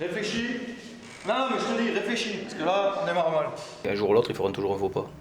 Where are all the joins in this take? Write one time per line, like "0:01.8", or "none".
0:03.7